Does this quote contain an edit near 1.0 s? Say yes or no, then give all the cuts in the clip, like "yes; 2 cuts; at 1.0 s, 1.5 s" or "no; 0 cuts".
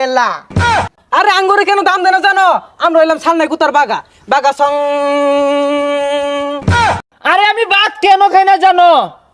yes; 2 cuts; at 1.0 s, 6.9 s